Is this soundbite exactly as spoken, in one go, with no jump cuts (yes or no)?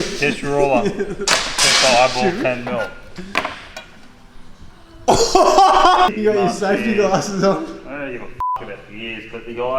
no